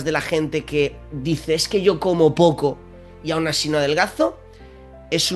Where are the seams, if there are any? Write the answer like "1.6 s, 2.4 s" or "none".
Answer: none